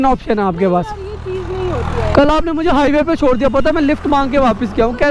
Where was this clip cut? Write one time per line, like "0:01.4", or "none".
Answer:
none